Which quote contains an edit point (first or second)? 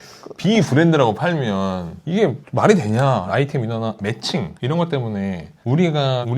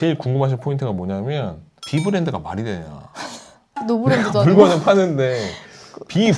first